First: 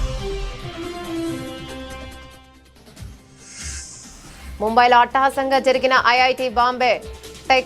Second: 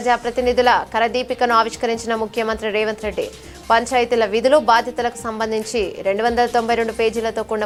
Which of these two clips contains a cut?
first; 1 cut; at 4.1 s

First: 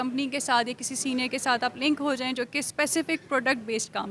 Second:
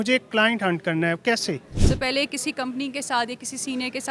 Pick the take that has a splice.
second; 1 cut; at 1.7 s

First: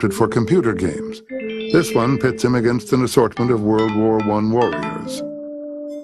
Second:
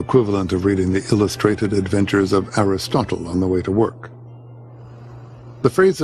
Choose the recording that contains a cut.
first; 1 cut; at 1.5 s

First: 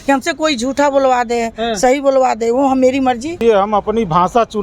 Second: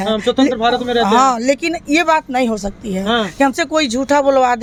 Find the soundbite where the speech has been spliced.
first; 1 cut; at 3.4 s

